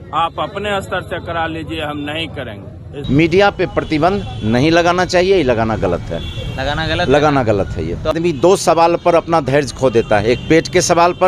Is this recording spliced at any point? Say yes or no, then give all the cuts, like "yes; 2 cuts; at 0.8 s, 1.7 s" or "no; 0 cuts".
yes; 2 cuts; at 2.9 s, 8.1 s